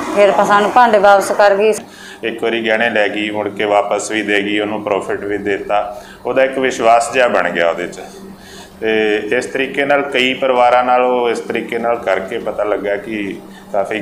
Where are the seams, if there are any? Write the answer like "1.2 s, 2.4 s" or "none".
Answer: 1.8 s